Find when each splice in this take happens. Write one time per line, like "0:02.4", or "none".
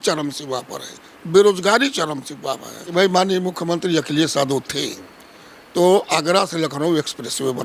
0:02.8